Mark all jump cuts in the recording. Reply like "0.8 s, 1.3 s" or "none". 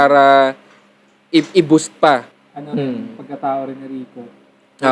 2.3 s